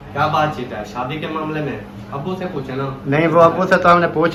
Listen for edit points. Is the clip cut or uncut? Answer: uncut